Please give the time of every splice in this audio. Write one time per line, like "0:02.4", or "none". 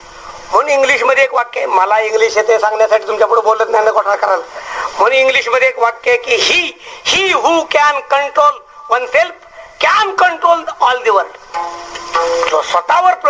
none